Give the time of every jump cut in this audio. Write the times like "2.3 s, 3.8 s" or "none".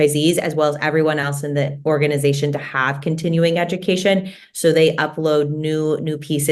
none